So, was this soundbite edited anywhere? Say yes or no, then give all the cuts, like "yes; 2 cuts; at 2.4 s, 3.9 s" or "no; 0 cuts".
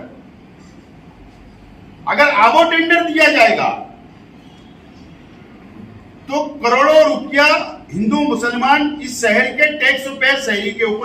no; 0 cuts